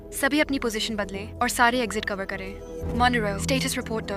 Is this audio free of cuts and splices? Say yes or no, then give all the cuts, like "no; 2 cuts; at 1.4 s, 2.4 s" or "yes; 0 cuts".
yes; 0 cuts